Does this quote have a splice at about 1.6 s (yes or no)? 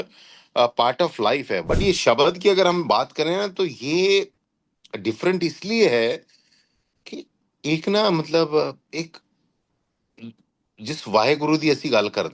yes